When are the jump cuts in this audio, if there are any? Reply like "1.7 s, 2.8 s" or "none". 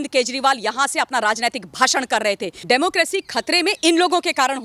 2.5 s